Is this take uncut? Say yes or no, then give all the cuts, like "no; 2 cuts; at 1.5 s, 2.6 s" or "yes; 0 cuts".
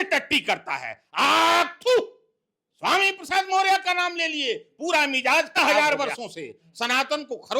no; 1 cut; at 5.6 s